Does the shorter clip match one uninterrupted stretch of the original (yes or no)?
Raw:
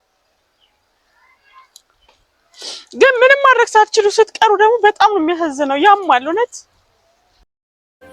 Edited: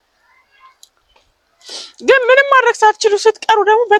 yes